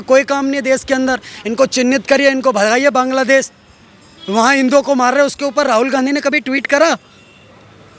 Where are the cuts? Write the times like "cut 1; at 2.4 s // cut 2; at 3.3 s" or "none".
none